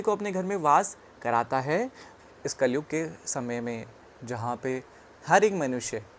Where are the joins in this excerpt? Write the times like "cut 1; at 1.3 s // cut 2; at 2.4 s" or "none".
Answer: cut 1; at 2.1 s